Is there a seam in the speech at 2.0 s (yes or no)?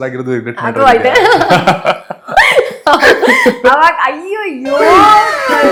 no